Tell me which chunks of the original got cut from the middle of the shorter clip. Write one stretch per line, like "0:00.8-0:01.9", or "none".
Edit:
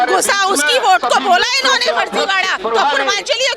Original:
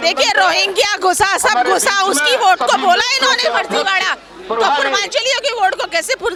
0:04.1-0:04.4